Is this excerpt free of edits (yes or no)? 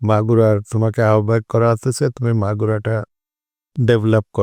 yes